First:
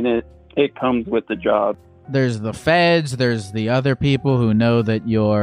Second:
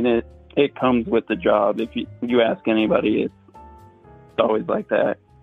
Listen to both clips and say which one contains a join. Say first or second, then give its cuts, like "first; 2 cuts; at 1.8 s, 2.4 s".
first; 1 cut; at 1.8 s